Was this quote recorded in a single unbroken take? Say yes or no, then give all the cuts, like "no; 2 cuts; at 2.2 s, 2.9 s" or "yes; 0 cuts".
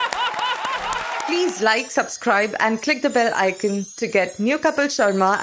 no; 1 cut; at 1.3 s